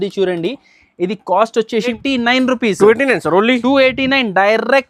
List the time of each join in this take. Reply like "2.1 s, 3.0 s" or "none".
1.9 s